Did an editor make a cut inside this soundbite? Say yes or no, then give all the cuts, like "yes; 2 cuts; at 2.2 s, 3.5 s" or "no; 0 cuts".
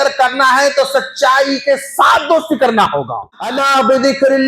yes; 1 cut; at 3.6 s